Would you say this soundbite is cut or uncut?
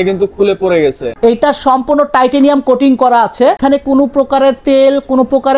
cut